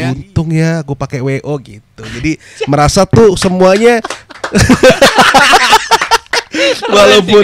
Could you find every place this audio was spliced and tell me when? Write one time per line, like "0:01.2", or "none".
none